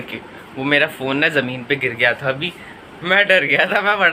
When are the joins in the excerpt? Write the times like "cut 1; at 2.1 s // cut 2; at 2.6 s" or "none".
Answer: none